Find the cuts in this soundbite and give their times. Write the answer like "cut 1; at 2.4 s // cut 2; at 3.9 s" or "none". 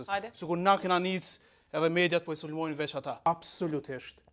cut 1; at 3.3 s